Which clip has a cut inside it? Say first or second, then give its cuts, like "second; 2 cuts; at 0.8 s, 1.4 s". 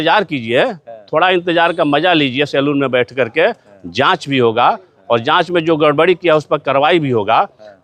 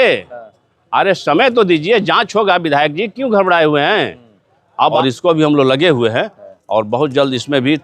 second; 1 cut; at 5.0 s